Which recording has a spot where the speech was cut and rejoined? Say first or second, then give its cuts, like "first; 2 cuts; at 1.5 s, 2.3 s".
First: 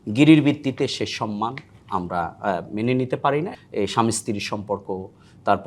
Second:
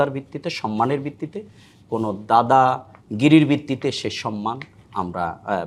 first; 1 cut; at 3.6 s